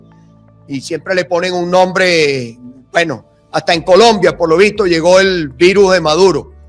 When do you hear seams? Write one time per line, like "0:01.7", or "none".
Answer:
0:05.5